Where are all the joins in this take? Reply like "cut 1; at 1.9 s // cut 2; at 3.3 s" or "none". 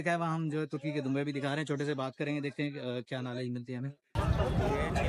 cut 1; at 4.2 s